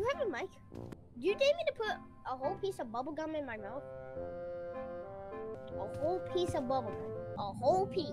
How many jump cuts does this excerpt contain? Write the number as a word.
three